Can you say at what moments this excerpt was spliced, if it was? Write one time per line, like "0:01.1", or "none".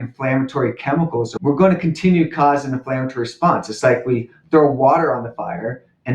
0:01.3